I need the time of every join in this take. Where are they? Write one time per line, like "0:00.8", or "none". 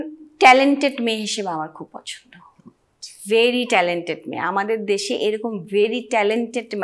none

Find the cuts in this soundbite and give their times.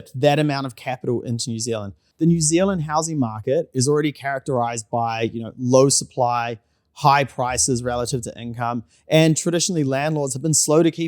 0:02.0

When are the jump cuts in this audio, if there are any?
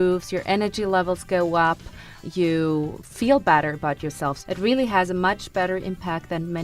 0:02.1
0:03.0
0:04.4

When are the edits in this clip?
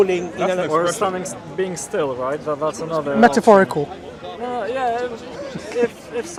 none

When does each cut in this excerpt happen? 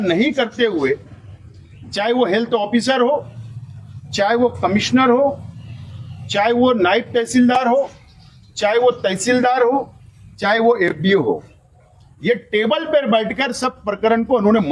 none

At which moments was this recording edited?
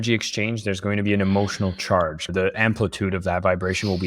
0:02.3

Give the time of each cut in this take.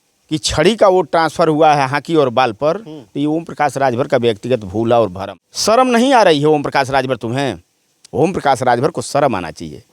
0:05.2

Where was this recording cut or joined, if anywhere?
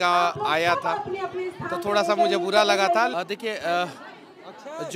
0:03.1

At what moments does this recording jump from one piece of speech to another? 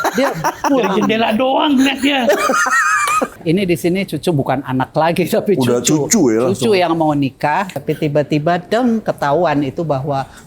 0:03.3
0:07.7

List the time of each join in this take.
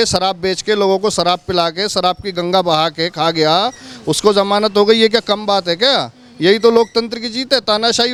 none

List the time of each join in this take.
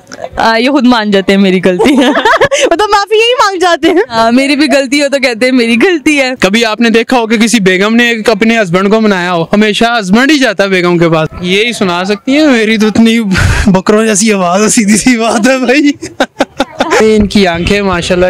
0:06.3
0:11.3
0:17.0

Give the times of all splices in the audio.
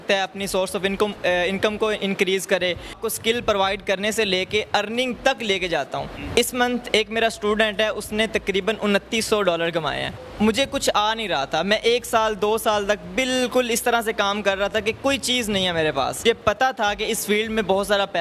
0:03.0
0:06.1
0:10.2
0:16.2

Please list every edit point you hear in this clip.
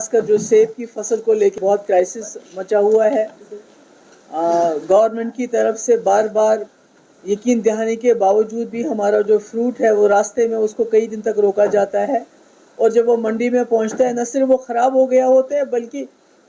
0:01.6

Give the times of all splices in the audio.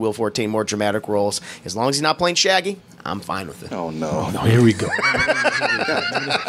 none

